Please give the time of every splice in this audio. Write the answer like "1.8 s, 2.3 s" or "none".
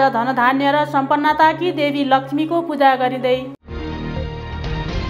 none